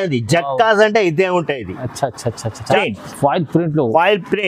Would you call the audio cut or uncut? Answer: cut